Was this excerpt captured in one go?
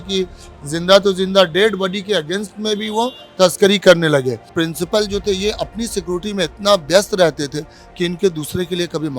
no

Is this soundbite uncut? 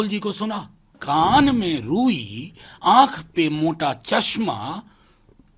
no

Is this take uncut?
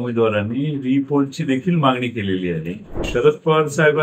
no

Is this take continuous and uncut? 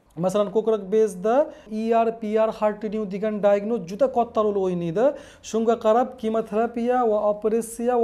no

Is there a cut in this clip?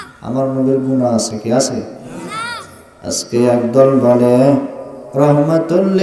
no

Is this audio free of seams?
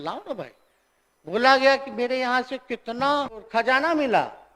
no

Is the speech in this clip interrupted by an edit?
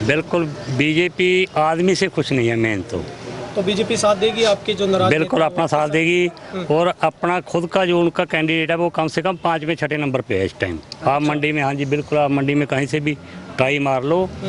no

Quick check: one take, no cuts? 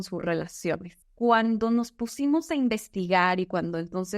no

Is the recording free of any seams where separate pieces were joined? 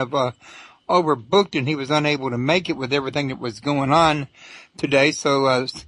yes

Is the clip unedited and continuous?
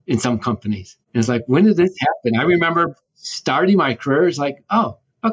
no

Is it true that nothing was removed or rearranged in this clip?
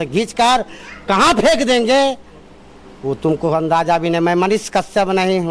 yes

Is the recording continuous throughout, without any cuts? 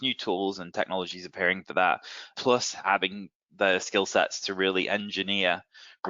no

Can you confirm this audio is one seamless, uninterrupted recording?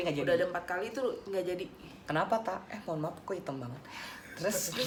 yes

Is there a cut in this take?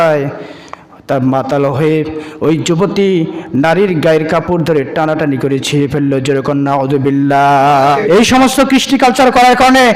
yes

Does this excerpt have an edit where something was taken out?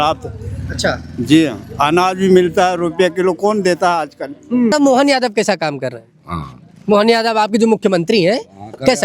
yes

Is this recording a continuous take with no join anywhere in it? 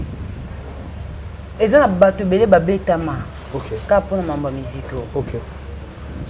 yes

